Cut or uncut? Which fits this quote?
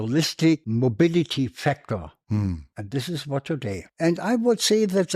uncut